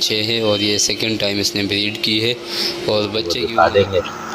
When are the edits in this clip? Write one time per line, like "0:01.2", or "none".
0:03.4

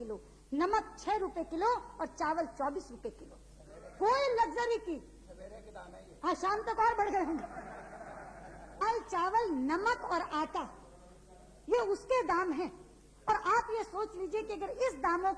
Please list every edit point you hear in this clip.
0:08.8

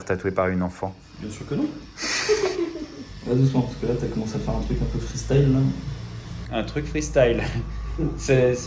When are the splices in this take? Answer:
0:02.9

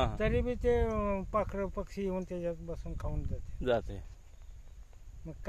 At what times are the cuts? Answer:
none

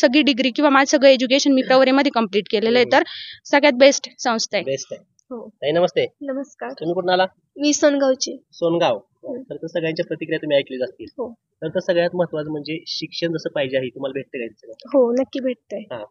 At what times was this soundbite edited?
none

